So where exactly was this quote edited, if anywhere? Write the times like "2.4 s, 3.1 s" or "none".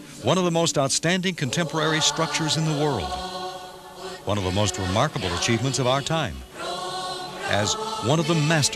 none